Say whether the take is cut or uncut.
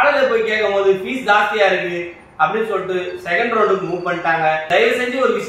cut